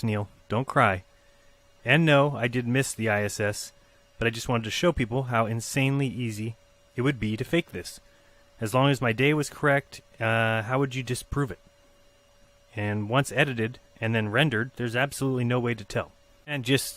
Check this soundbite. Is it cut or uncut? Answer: uncut